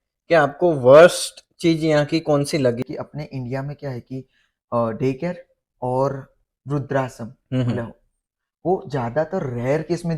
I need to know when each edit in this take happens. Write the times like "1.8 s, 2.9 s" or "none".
2.8 s